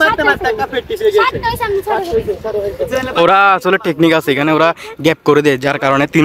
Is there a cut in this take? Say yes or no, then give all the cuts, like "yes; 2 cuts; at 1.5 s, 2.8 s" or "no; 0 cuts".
no; 0 cuts